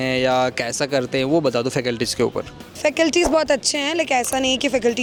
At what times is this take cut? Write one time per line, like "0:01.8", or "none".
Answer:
none